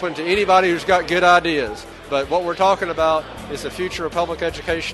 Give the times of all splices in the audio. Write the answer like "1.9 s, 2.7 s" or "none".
1.9 s